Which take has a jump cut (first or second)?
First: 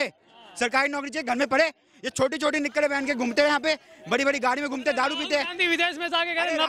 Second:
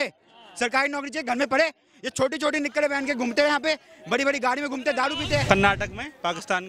second